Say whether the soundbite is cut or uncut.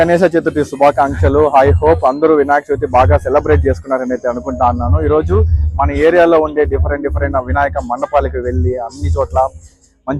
uncut